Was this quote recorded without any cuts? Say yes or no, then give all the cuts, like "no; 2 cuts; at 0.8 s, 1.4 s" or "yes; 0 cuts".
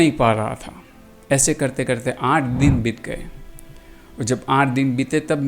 yes; 0 cuts